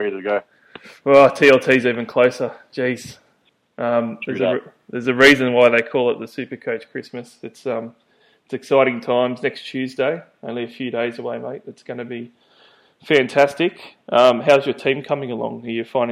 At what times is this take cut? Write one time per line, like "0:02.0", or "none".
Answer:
none